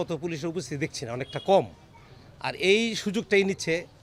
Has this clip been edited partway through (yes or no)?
no